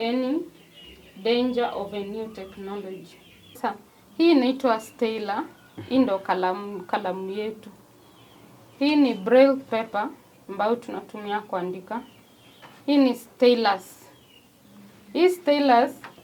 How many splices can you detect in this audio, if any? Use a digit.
1